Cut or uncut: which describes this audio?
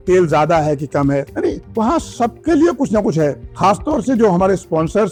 uncut